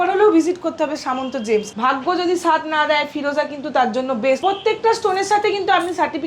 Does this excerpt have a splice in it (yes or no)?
yes